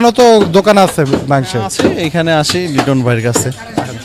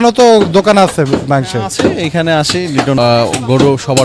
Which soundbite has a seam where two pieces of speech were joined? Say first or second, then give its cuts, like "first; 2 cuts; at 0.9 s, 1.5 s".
second; 1 cut; at 3.0 s